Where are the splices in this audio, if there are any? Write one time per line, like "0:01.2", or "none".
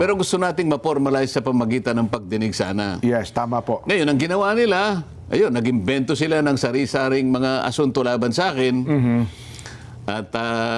none